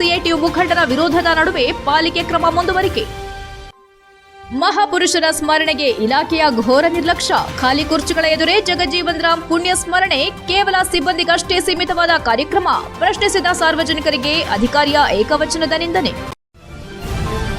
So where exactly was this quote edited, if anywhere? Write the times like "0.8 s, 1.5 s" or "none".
16.3 s